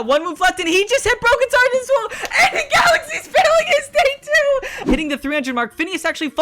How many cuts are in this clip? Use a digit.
1